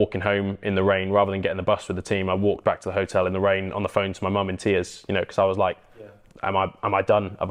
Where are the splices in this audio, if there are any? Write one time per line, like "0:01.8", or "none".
none